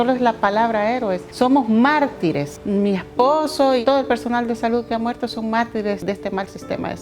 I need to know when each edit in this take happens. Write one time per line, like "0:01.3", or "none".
0:01.2
0:02.5
0:03.8
0:06.0